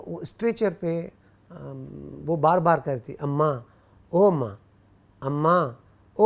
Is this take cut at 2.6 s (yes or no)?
no